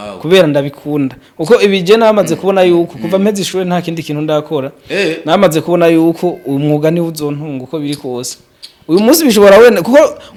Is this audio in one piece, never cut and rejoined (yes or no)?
yes